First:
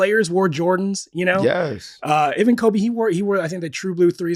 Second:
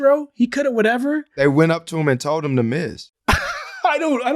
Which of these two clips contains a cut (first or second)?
second